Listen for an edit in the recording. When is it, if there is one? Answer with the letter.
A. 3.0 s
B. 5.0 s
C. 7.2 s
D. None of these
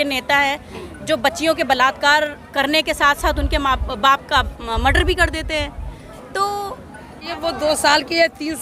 C